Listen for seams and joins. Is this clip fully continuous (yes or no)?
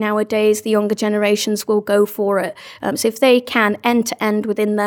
yes